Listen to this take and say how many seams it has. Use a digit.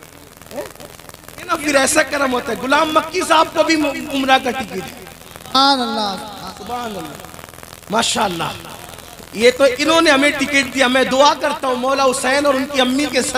1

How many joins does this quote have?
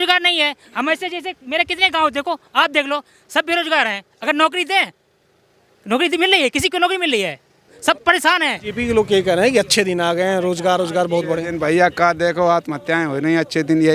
1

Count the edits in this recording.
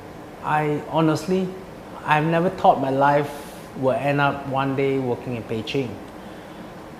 1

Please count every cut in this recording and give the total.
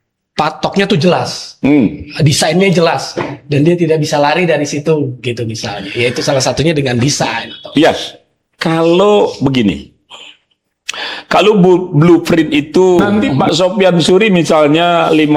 1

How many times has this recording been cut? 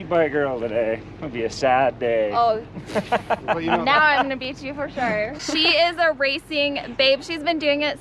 1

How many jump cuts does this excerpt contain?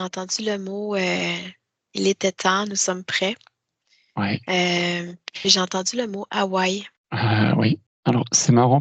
2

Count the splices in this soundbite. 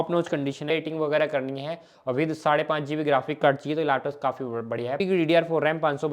2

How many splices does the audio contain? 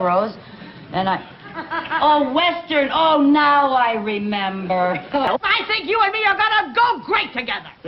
1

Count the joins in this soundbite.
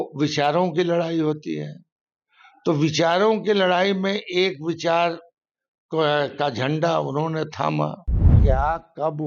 1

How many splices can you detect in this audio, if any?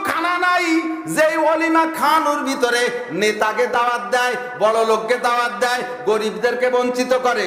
0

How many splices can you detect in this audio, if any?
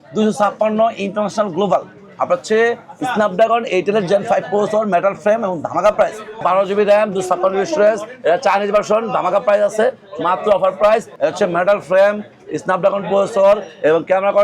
2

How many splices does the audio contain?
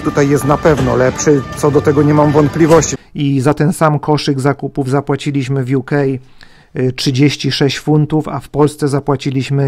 1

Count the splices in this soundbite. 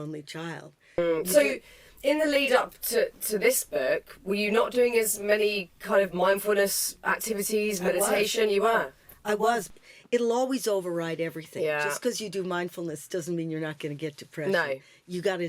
2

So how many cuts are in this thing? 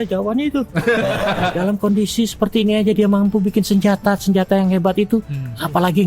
1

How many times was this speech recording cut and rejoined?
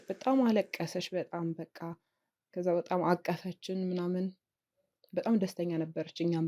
0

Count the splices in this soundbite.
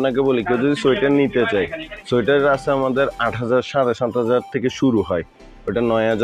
0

